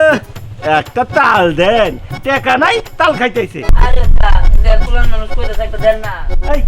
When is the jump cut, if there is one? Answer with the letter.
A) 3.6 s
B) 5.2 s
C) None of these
A